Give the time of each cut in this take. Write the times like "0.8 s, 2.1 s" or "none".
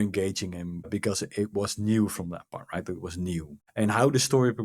3.6 s